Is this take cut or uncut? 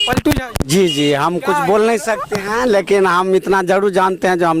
uncut